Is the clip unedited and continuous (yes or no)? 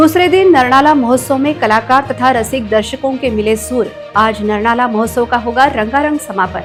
yes